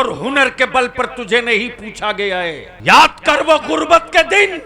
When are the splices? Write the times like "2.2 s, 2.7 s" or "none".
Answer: 2.7 s

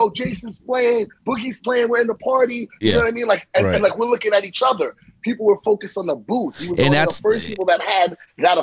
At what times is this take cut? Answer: none

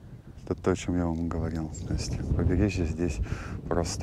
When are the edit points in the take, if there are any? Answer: none

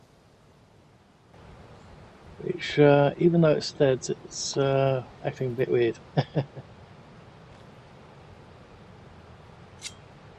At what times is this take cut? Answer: 1.3 s

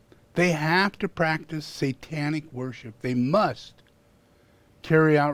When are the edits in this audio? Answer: none

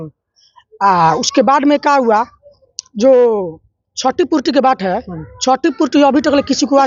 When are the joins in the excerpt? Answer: none

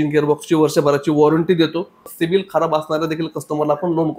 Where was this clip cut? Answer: 2.0 s

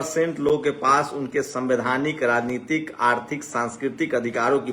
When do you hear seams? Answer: none

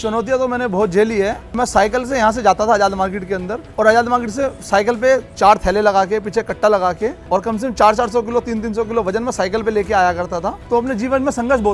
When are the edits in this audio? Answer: 1.5 s, 3.6 s, 5.3 s, 7.2 s, 10.6 s

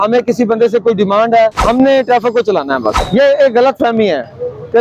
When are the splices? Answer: 1.6 s, 3.0 s

